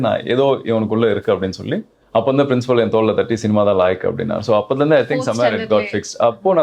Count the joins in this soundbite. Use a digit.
1